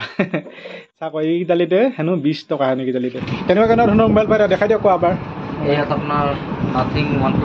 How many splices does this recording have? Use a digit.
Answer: 1